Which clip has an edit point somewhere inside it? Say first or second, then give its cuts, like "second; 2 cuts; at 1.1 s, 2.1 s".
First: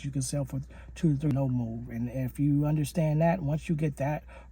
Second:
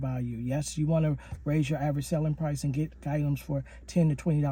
first; 1 cut; at 1.3 s